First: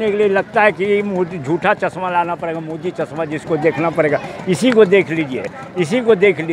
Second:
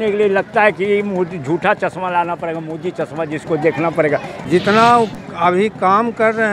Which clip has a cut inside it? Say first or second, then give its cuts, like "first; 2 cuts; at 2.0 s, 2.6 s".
second; 1 cut; at 4.3 s